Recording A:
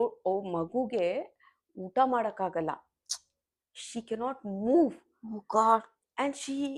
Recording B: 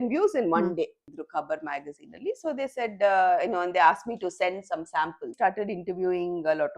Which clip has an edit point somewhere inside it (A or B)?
B